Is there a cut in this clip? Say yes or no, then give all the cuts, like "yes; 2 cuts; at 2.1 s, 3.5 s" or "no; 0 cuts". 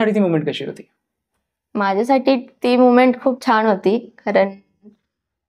no; 0 cuts